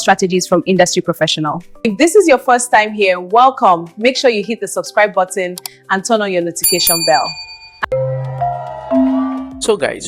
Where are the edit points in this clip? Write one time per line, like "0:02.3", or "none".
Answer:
none